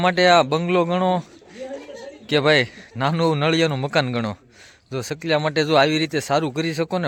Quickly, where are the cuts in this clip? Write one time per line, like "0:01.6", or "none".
none